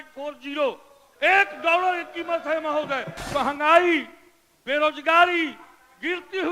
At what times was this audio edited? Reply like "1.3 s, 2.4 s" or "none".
3.2 s